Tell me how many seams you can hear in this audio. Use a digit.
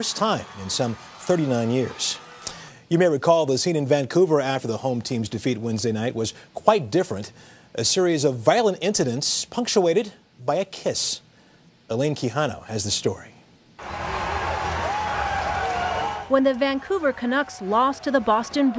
1